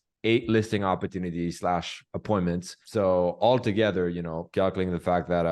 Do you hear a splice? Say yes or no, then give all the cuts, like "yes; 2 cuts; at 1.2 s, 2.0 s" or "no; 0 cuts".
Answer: yes; 2 cuts; at 2.8 s, 4.4 s